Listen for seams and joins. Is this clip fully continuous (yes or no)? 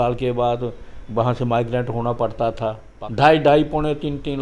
no